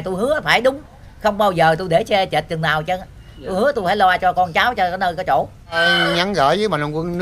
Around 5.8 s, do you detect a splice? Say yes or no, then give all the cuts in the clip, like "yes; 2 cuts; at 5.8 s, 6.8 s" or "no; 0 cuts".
yes; 1 cut; at 5.8 s